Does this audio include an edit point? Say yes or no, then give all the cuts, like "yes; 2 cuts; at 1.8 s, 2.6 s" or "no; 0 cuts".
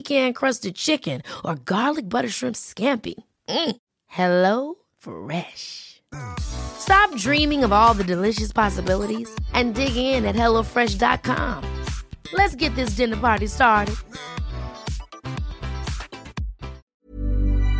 yes; 1 cut; at 16.8 s